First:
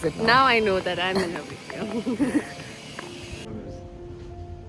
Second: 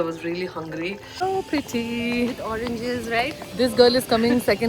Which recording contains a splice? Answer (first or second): second